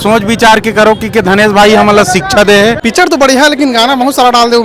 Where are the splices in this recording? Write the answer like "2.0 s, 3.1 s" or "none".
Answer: 2.8 s